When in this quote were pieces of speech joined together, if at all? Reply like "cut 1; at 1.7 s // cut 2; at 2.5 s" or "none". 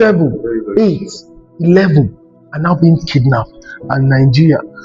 none